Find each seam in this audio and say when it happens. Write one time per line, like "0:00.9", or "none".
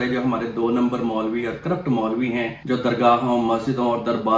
0:02.6

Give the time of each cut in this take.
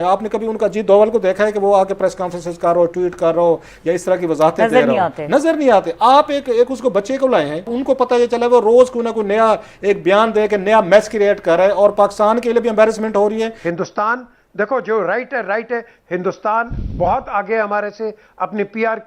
0:07.7
0:13.6

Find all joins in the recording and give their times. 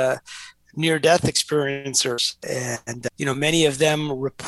0:02.8

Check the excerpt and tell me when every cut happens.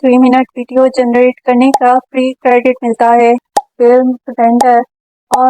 0:03.5

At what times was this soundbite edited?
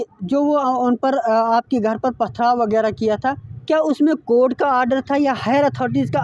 none

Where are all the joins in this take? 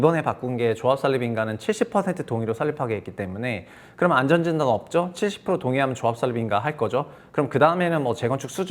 none

